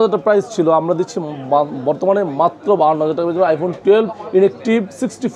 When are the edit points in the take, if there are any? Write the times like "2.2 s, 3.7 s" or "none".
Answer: none